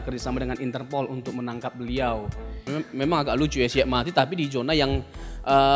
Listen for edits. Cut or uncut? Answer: cut